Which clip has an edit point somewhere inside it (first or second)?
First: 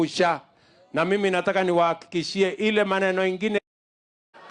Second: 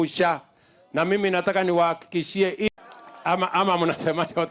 second